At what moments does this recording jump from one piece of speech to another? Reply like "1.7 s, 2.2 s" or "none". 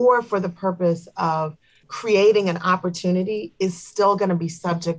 1.8 s